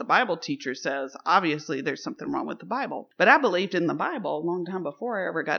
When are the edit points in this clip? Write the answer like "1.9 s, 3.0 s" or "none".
none